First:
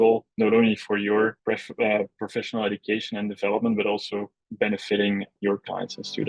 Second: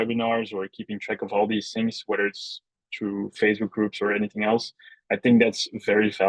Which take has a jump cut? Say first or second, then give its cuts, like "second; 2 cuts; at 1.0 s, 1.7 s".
first; 3 cuts; at 1.4 s, 4.4 s, 5.3 s